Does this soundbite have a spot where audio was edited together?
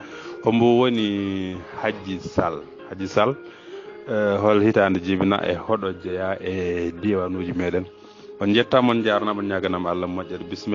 no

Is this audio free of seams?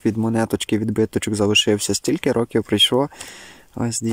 yes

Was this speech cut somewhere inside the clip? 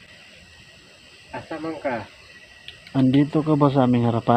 no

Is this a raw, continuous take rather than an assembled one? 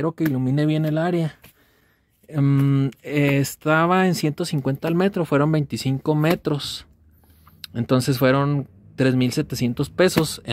yes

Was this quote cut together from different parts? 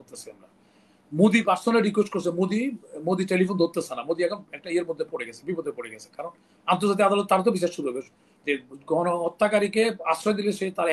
no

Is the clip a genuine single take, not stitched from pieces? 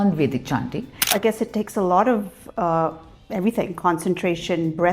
no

